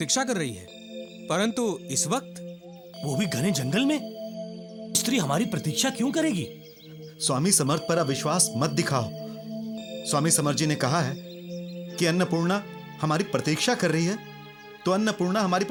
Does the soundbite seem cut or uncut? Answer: uncut